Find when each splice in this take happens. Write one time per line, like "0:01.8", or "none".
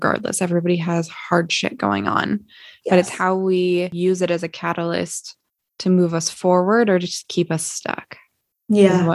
0:03.9